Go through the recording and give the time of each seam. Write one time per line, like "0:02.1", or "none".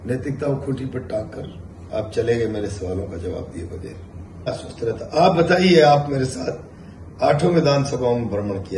0:04.7